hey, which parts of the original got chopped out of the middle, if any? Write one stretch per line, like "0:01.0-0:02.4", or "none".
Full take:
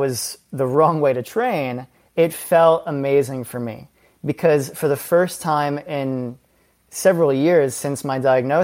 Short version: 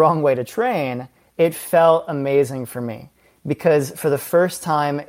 none